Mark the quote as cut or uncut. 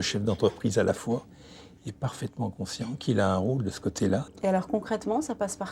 cut